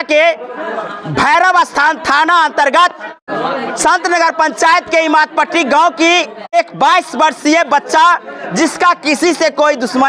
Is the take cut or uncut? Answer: cut